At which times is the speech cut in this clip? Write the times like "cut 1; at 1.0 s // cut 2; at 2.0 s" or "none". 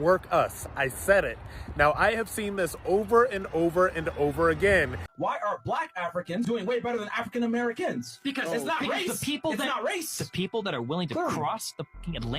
cut 1; at 5.1 s